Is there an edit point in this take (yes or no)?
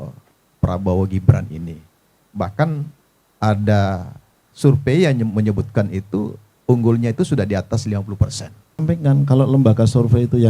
yes